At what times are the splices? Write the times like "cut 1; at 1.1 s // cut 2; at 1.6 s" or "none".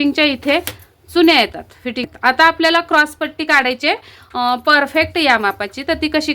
cut 1; at 2.0 s